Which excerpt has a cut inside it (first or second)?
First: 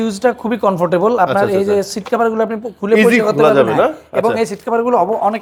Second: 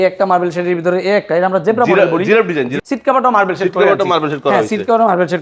second